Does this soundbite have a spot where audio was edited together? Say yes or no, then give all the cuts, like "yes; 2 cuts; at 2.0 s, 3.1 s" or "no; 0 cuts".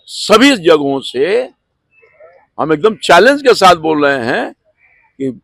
no; 0 cuts